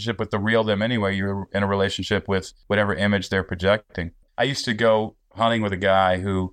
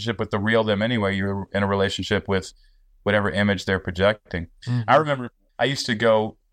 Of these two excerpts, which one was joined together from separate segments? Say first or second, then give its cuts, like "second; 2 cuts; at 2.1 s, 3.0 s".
first; 2 cuts; at 2.5 s, 4.2 s